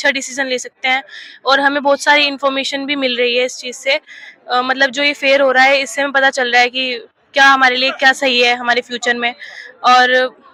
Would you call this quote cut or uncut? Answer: uncut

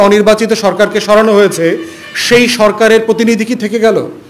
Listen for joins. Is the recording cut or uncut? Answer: uncut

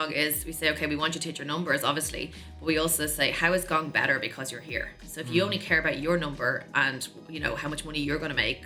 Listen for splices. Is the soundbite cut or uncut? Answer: uncut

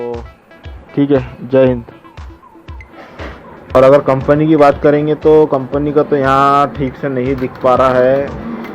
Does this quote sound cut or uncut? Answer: cut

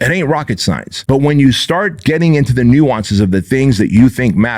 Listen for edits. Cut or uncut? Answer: cut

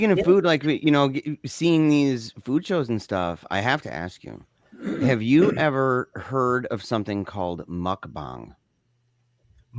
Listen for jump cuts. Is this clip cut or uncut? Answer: uncut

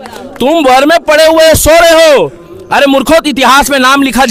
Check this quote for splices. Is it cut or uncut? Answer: uncut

